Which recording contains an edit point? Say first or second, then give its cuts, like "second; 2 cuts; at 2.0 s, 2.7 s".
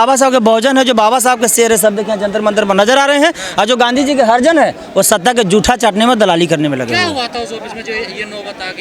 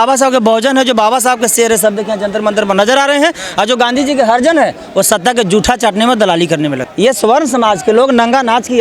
second; 1 cut; at 6.8 s